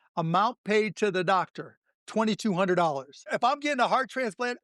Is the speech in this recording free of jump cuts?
no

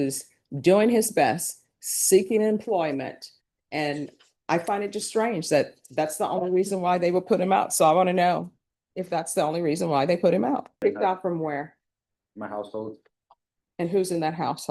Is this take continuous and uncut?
no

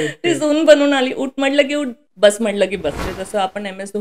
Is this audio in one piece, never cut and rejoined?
no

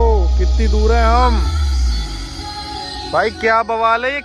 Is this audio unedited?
yes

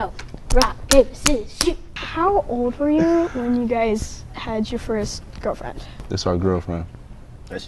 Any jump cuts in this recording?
no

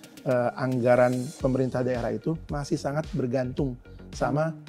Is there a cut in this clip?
no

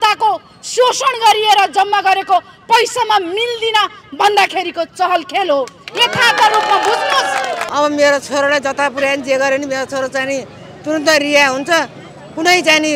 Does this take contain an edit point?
yes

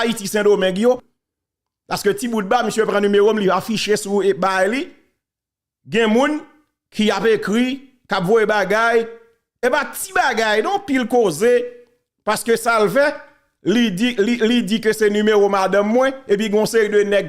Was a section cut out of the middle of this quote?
yes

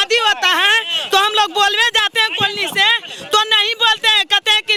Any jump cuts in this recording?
no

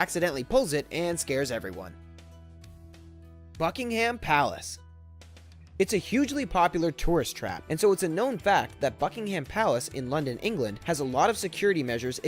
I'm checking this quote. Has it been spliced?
no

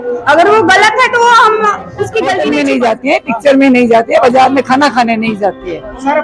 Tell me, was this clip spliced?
yes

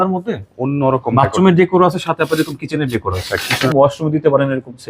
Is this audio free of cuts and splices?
no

